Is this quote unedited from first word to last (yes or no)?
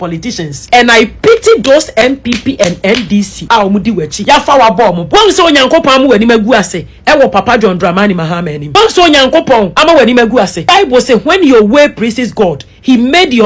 yes